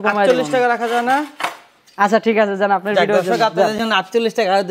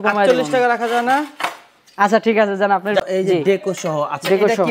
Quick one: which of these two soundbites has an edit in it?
second; 1 cut; at 3.0 s

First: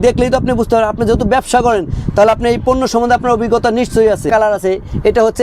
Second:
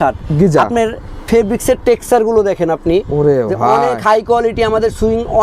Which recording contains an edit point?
first; 1 cut; at 4.3 s

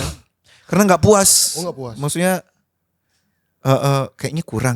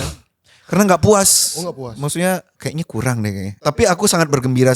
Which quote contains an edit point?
second; 2 cuts; at 2.6 s, 3.5 s

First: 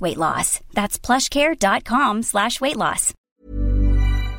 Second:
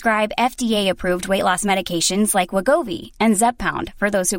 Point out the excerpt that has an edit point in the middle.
first; 1 cut; at 3.1 s

